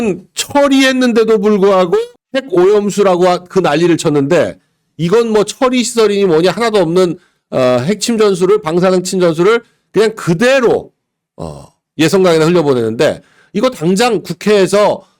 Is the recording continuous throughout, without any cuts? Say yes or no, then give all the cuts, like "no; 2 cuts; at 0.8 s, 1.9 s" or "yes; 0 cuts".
yes; 0 cuts